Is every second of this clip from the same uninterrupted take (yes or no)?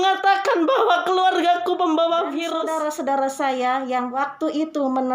no